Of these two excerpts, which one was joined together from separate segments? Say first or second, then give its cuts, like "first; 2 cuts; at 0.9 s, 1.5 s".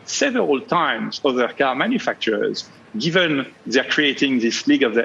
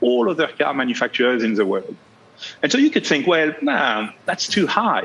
first; 1 cut; at 2.7 s